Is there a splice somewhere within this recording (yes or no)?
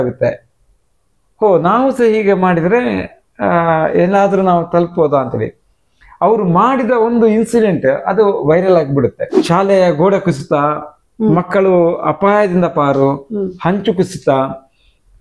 yes